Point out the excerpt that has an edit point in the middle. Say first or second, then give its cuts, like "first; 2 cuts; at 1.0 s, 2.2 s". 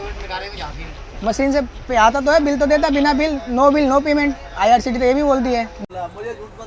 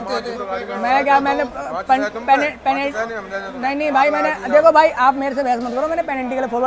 first; 1 cut; at 5.8 s